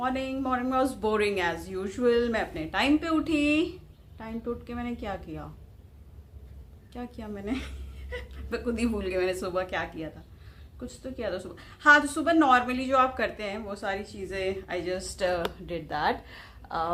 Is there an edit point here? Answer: no; 0 cuts

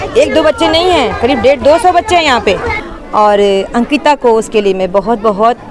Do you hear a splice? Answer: yes; 1 cut; at 2.8 s

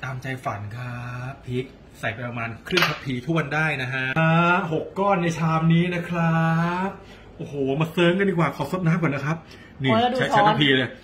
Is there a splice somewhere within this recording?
yes; 1 cut; at 4.0 s

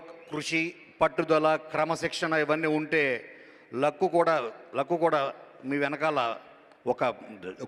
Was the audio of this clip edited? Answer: no; 0 cuts

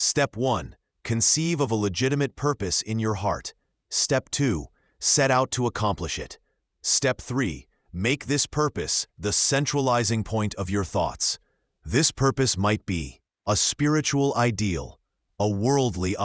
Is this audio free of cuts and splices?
yes; 0 cuts

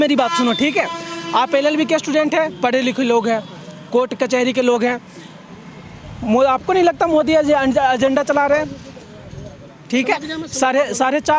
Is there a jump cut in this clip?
no; 0 cuts

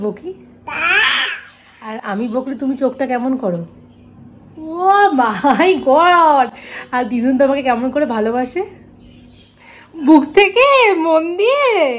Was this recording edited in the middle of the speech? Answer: no; 0 cuts

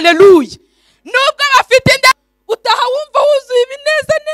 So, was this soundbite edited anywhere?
yes; 1 cut; at 2.1 s

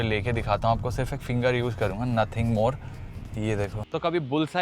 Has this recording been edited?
yes; 1 cut; at 3.3 s

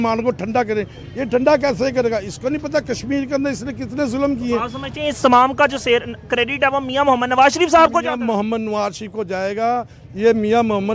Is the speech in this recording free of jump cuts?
yes; 0 cuts

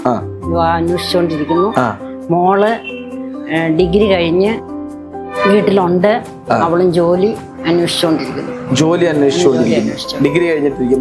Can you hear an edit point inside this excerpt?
no; 0 cuts

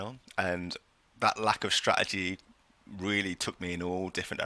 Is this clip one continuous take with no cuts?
yes; 0 cuts

